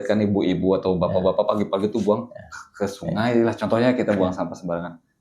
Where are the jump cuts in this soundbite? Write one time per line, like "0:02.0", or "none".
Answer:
none